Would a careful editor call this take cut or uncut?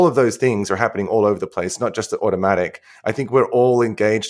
uncut